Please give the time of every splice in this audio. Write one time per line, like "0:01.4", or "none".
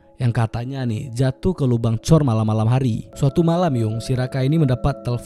0:03.1